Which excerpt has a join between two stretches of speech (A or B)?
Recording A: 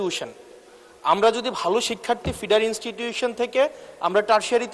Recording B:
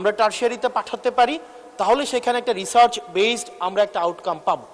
A